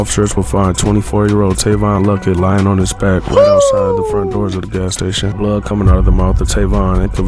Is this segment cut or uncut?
cut